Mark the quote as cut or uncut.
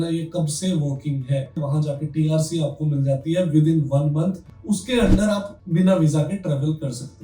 cut